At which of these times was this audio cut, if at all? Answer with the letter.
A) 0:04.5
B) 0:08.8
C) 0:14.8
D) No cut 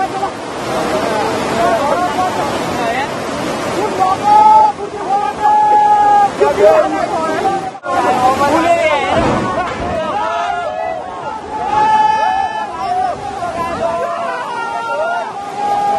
A